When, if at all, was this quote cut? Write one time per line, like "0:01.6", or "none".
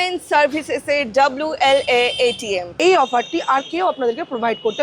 0:02.7